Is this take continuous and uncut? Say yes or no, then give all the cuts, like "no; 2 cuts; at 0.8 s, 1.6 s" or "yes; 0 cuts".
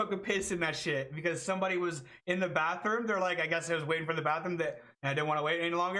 yes; 0 cuts